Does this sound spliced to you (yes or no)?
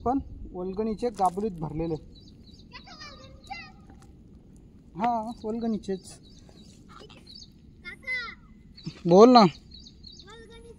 yes